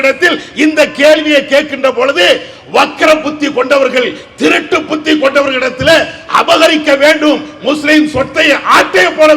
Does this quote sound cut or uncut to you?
uncut